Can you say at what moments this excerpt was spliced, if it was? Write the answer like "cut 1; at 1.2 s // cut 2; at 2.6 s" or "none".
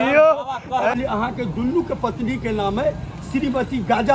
cut 1; at 1.0 s